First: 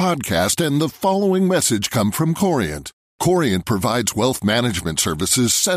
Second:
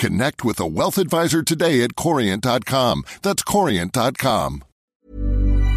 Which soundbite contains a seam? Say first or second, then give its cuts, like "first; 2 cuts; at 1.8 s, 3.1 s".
second; 1 cut; at 4.7 s